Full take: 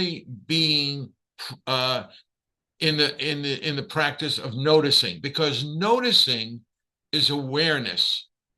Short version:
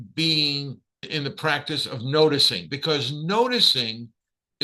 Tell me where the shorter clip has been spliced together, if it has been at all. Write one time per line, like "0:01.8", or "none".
0:01.1